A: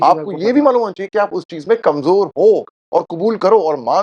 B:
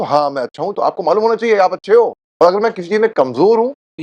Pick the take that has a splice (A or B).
B